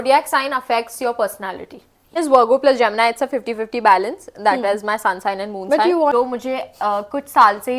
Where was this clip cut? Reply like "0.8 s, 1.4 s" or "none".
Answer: 2.2 s, 6.1 s